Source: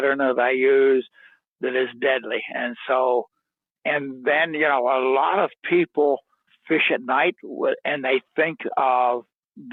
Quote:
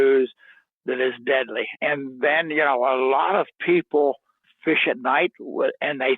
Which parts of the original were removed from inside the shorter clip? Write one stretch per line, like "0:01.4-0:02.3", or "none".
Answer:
0:02.4-0:03.7